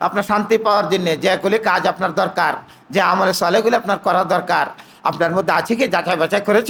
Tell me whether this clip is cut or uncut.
uncut